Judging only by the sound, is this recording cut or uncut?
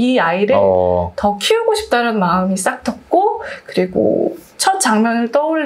uncut